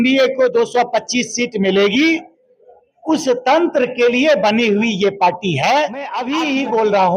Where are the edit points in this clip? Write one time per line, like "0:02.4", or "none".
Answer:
0:06.2